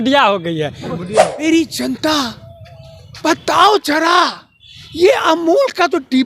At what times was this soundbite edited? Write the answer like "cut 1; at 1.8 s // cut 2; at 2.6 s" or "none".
cut 1; at 1.4 s